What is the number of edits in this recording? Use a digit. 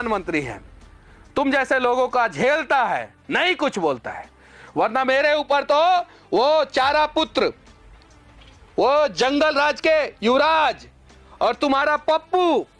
0